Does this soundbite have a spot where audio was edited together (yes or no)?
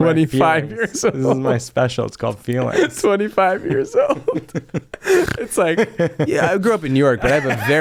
no